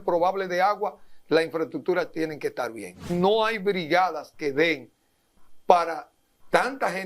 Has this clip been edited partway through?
yes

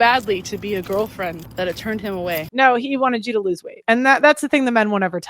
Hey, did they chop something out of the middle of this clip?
yes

